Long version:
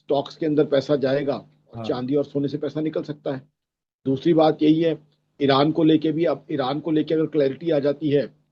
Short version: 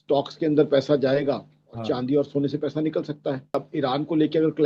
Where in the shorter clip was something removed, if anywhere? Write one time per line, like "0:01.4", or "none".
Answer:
0:03.7